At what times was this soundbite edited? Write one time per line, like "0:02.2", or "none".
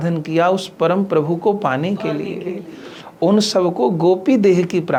none